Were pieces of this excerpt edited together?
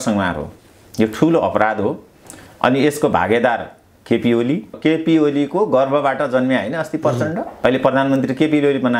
yes; 2 cuts; at 4.7 s, 7.5 s

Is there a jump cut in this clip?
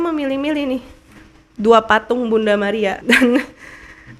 yes; 1 cut; at 3.0 s

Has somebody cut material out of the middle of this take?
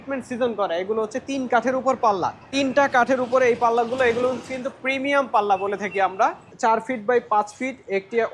yes; 2 cuts; at 2.5 s, 6.5 s

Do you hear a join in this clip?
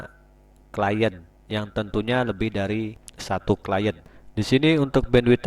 no; 0 cuts

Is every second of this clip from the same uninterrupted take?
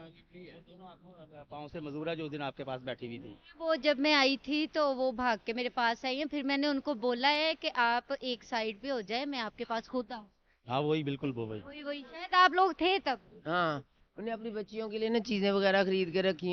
yes; 0 cuts

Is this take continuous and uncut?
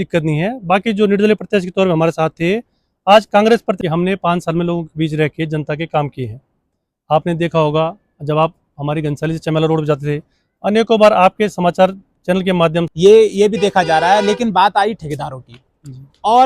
no; 2 cuts; at 3.7 s, 12.9 s

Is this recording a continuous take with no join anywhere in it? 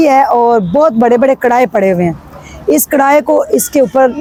yes; 0 cuts

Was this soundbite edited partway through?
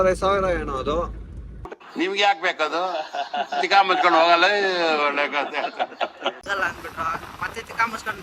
yes; 1 cut; at 6.4 s

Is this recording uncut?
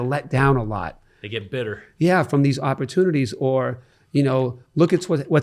yes; 0 cuts

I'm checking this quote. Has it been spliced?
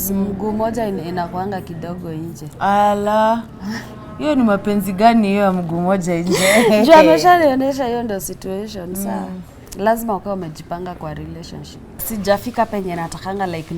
yes; 1 cut; at 12.1 s

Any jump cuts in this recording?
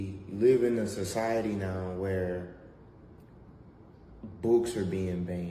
no; 0 cuts

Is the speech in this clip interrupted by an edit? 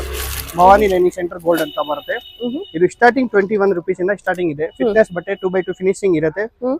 no; 0 cuts

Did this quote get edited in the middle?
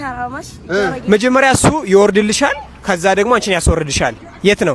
yes; 1 cut; at 1.1 s

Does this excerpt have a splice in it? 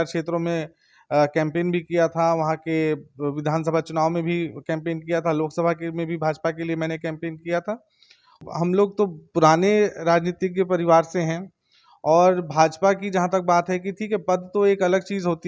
yes; 1 cut; at 8.4 s

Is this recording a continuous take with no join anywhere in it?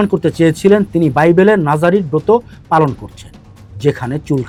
yes; 0 cuts

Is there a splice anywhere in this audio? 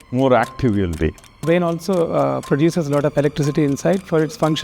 yes; 1 cut; at 1.4 s

